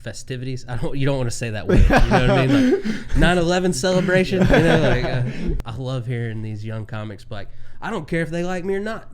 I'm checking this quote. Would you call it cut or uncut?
cut